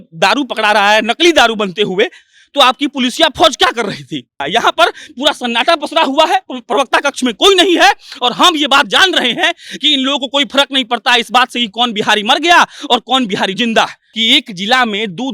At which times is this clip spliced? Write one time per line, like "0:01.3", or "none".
0:04.4
0:14.1